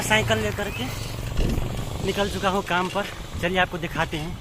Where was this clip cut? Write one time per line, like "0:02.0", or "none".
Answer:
none